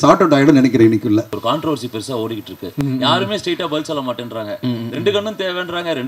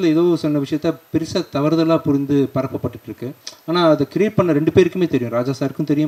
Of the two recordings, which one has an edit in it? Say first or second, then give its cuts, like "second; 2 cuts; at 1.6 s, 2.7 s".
first; 1 cut; at 1.4 s